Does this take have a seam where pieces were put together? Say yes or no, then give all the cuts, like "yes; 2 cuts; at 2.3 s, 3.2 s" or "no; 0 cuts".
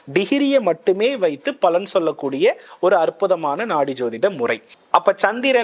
yes; 1 cut; at 4.7 s